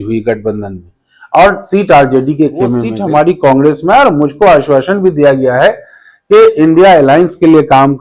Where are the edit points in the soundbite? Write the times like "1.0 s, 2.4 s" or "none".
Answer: 2.9 s